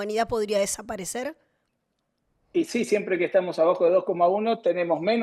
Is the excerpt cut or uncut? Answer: uncut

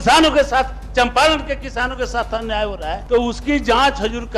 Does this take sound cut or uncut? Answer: cut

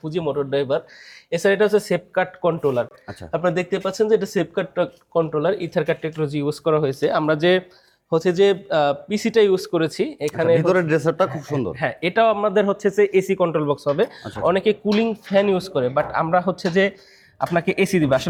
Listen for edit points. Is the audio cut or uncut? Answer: uncut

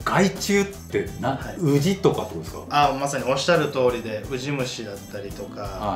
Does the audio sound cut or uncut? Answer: uncut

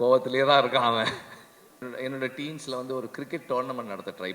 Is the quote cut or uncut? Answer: cut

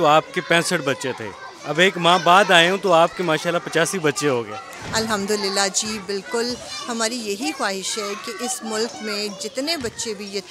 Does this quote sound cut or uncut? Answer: uncut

